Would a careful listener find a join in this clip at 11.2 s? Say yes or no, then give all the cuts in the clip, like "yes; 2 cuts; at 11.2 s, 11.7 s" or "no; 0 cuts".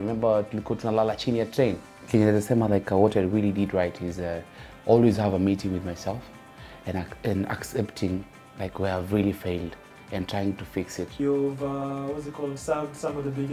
yes; 2 cuts; at 1.9 s, 11.2 s